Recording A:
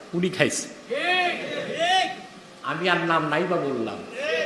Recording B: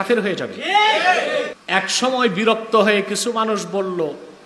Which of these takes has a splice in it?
B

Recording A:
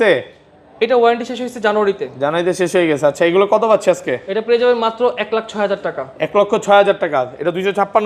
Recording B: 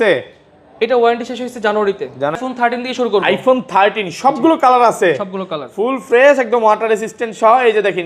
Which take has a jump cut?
B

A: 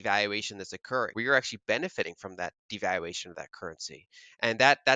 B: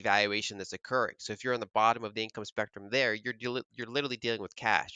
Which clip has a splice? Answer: A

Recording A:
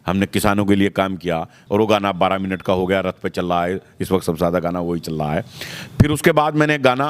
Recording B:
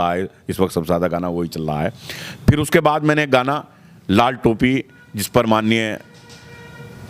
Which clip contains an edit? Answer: A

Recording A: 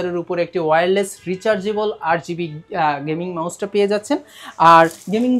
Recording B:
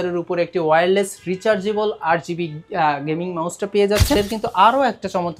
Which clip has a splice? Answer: B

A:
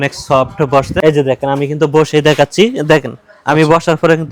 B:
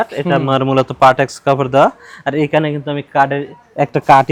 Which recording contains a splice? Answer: A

